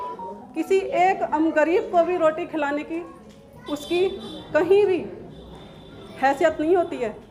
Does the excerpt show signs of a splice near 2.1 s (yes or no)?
no